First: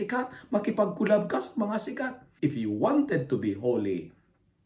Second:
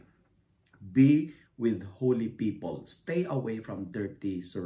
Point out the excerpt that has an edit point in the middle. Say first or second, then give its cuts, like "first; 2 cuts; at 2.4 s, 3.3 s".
first; 1 cut; at 2.2 s